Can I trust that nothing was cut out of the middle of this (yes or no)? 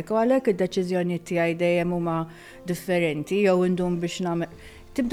yes